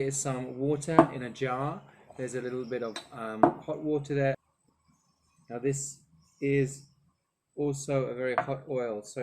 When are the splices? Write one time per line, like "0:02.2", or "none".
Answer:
0:04.5